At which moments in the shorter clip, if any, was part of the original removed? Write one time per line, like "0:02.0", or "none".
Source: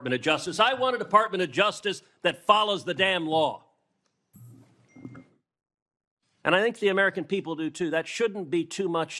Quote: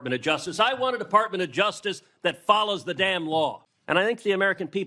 0:03.7